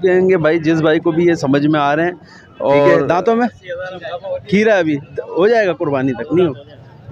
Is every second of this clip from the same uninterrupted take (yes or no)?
no